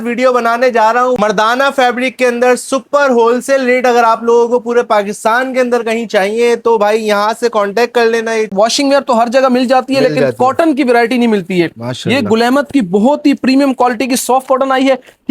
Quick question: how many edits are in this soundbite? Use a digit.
2